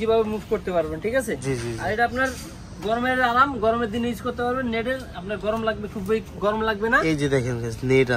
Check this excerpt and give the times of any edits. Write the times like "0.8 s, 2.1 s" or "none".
none

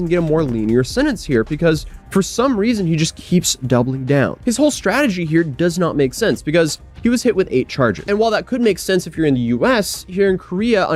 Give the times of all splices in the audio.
none

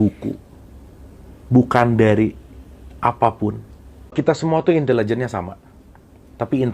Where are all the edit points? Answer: 4.1 s

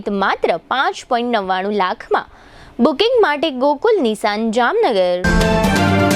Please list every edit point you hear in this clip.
5.2 s

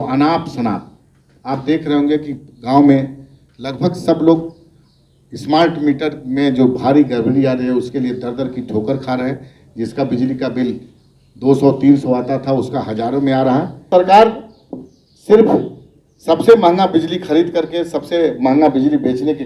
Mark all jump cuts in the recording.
13.8 s

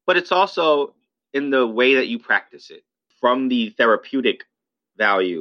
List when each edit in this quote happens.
3.0 s

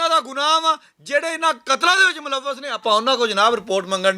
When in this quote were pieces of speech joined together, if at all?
none

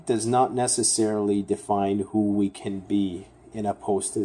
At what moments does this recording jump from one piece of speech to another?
none

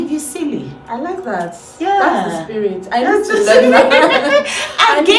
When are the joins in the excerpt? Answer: none

